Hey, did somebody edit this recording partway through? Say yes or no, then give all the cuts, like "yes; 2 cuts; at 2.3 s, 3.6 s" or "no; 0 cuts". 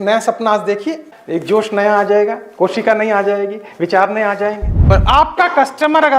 yes; 1 cut; at 4.8 s